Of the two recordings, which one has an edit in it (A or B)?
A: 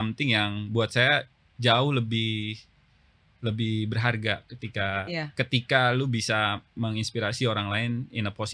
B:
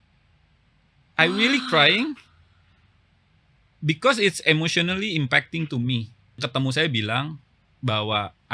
B